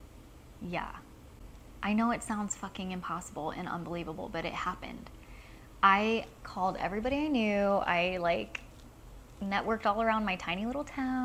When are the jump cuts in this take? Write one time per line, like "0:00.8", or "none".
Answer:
none